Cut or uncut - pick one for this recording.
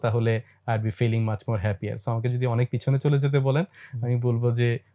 uncut